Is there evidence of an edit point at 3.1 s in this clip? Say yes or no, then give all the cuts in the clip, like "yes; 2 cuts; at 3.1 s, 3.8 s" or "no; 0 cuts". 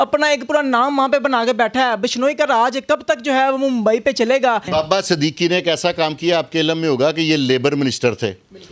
no; 1 cut; at 4.7 s